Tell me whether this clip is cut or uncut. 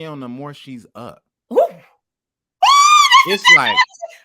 cut